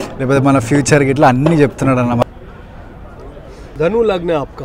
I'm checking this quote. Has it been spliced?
yes; 1 cut; at 2.2 s

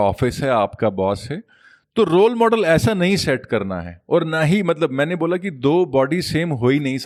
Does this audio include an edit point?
no; 0 cuts

